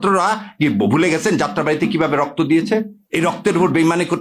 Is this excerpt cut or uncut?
cut